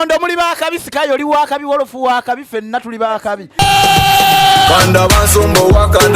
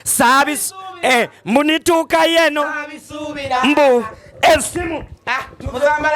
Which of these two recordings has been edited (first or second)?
first